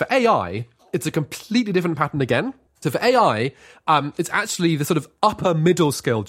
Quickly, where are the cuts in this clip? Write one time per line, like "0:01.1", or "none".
none